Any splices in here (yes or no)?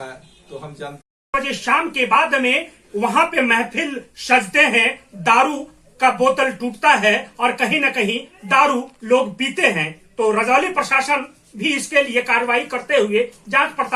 yes